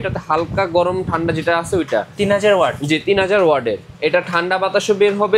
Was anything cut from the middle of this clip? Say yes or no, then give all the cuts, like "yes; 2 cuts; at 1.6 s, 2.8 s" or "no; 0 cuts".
yes; 1 cut; at 3.9 s